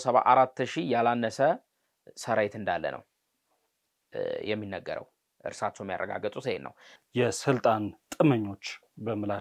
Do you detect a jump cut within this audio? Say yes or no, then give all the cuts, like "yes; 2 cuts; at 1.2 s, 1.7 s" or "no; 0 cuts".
yes; 1 cut; at 6.9 s